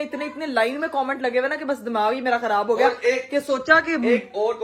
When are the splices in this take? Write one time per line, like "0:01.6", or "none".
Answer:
none